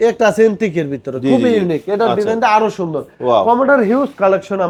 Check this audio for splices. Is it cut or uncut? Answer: uncut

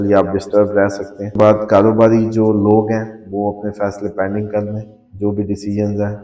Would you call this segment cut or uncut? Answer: cut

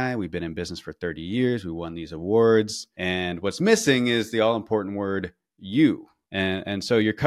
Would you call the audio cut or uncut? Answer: uncut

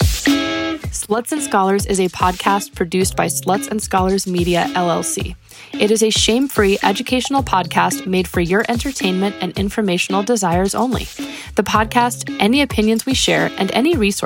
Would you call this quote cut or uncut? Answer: cut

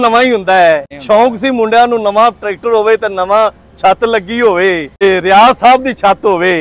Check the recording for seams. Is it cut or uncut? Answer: cut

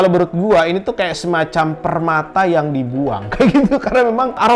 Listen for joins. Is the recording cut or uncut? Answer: uncut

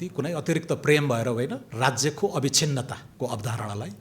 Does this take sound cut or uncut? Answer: cut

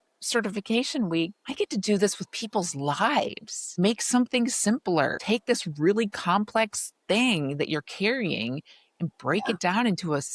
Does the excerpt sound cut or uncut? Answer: cut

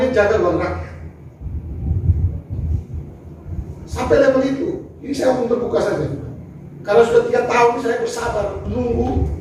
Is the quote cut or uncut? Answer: uncut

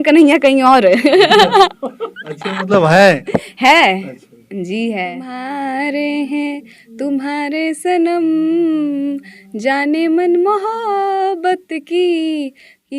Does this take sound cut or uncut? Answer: cut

